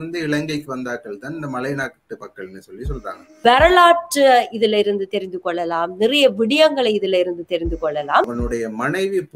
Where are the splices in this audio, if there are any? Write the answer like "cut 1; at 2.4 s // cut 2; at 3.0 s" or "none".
cut 1; at 3.4 s // cut 2; at 8.3 s